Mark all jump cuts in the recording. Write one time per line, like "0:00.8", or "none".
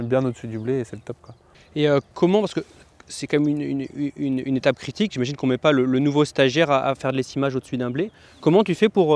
none